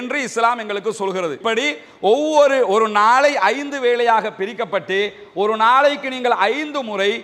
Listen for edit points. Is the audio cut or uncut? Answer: cut